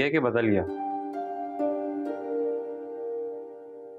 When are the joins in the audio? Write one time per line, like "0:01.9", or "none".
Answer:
none